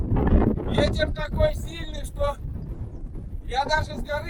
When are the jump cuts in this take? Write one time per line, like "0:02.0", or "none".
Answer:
none